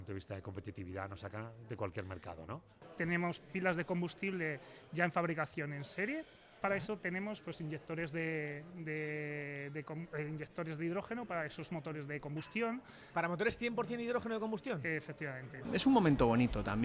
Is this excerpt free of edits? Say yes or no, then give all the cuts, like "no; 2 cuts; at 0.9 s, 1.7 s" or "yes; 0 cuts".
no; 3 cuts; at 2.8 s, 6.6 s, 15.6 s